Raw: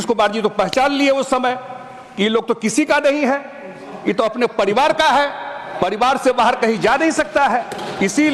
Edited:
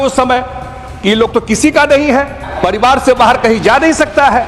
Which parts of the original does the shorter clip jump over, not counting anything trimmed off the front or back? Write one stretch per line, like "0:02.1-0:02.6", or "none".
0:03.6-0:05.6